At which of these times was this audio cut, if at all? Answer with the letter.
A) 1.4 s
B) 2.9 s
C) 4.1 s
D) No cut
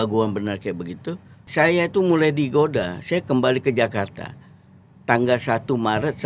A